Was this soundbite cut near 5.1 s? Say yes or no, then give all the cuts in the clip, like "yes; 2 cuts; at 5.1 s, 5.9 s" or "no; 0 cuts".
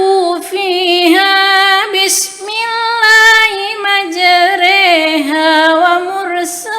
no; 0 cuts